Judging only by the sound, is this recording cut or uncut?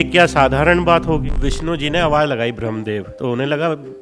cut